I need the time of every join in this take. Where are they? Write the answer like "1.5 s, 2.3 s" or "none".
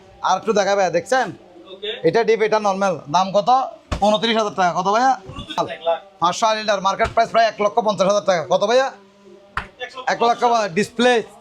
5.6 s